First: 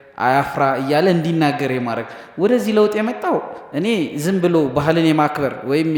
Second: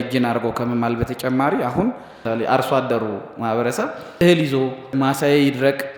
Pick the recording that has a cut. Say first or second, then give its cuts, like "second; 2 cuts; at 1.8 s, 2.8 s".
second; 3 cuts; at 2.2 s, 4.2 s, 4.9 s